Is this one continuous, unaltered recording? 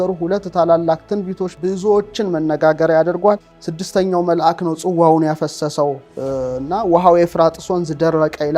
no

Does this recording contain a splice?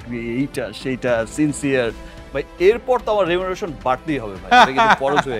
no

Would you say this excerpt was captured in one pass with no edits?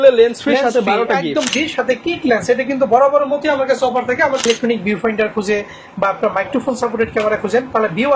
no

